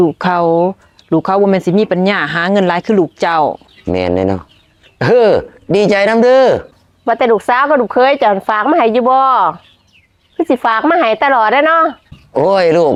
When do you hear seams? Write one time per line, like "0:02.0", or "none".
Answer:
none